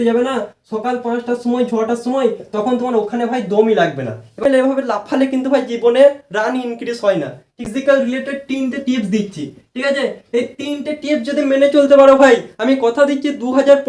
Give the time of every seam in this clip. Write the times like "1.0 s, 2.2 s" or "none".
4.4 s, 7.7 s